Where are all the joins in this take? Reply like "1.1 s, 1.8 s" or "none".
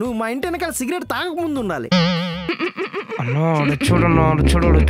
2.4 s